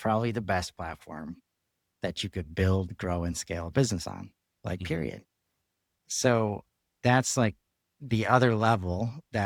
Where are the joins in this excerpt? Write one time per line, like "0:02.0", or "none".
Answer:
none

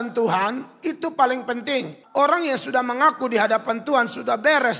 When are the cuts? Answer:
0:02.0

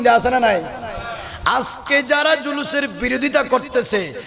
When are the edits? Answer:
none

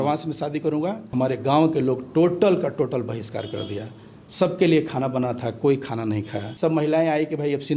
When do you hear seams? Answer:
0:01.0
0:06.4

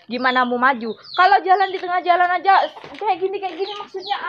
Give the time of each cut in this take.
none

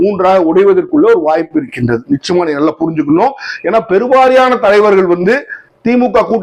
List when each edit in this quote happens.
none

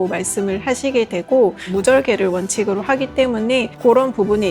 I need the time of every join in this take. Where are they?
0:01.7

